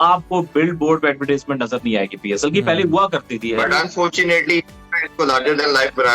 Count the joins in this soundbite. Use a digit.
1